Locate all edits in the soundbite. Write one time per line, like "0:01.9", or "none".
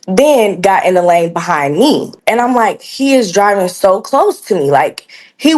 0:02.2